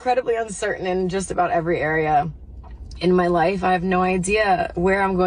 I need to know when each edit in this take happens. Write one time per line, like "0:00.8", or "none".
0:03.0